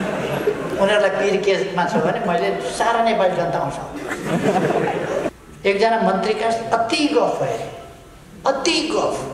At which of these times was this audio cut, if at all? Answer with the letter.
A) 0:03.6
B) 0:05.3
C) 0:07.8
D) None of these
B